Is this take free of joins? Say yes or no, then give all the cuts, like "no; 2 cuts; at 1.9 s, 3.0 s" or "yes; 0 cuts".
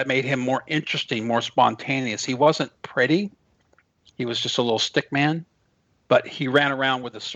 yes; 0 cuts